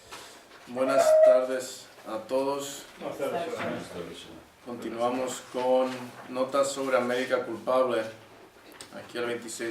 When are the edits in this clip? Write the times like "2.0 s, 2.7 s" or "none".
none